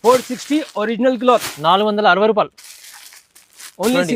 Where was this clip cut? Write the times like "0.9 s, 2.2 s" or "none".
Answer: none